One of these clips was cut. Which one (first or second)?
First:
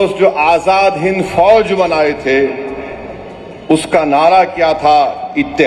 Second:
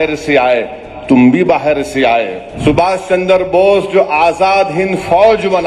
second